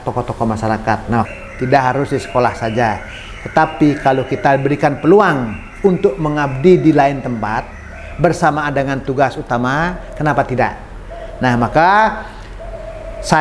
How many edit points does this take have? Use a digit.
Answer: 1